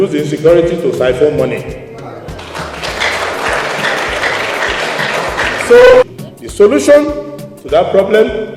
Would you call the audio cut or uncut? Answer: cut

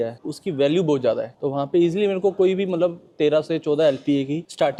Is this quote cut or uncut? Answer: uncut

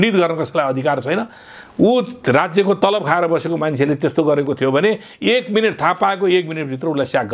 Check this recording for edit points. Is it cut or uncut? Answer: uncut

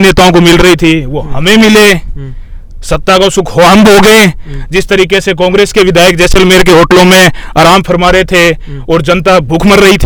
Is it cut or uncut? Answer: uncut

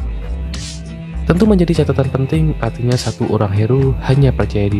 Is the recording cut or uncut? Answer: cut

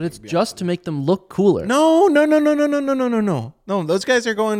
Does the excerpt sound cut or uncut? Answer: uncut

